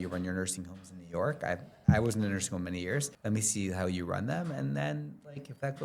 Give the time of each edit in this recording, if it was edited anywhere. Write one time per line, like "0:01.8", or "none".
0:03.1

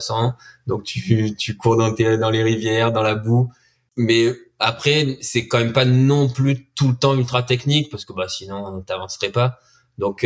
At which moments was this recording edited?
0:03.7

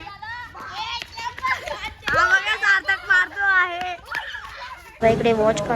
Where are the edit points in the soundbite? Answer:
0:04.7

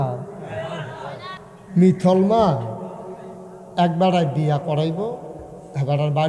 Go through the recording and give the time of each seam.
0:01.2

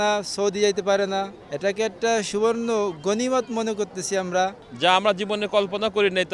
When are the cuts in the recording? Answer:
0:01.4
0:04.6

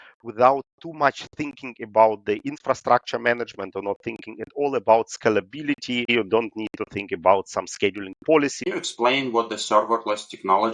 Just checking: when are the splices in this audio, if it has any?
0:06.1
0:08.7

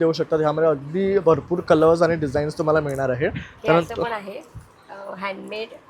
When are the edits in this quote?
none

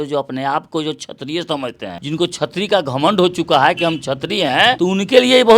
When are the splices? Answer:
0:02.0
0:04.8

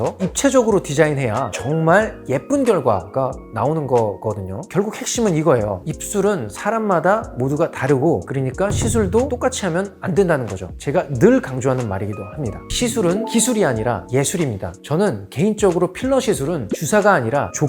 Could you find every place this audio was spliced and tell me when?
0:04.7
0:12.7

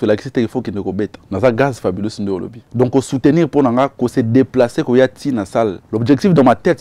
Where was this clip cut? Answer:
0:01.2
0:02.6
0:05.8

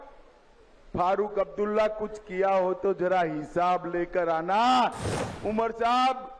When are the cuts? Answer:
0:05.1

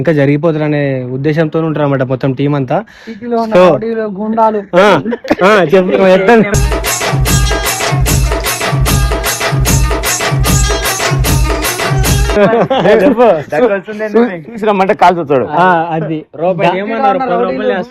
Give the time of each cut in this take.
none

